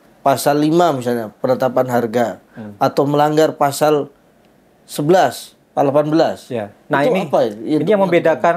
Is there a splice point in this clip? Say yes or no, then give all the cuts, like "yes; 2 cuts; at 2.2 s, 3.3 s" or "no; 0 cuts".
no; 0 cuts